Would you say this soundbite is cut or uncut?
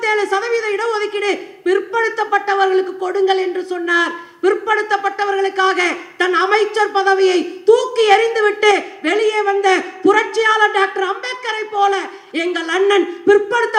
uncut